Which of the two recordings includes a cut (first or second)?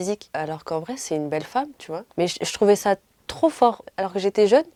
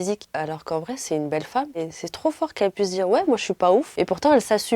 second